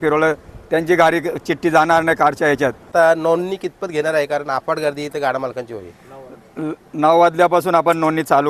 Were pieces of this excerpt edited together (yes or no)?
yes